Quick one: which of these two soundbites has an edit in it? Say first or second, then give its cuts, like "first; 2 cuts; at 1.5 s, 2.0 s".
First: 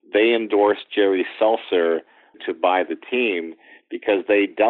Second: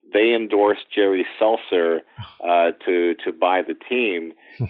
first; 1 cut; at 2.4 s